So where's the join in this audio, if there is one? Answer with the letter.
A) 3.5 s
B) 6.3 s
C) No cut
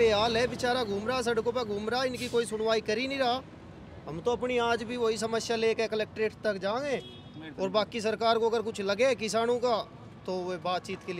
C